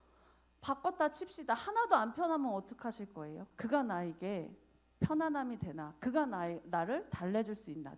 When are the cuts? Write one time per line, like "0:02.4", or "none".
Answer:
0:03.5